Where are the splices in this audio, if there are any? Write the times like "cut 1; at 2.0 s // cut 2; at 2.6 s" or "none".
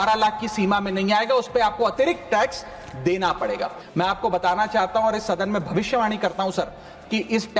cut 1; at 3.8 s